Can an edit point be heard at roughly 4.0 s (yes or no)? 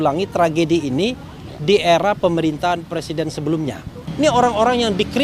yes